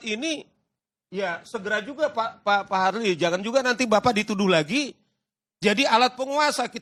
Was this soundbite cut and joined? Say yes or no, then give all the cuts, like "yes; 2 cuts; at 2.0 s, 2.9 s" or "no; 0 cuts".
no; 0 cuts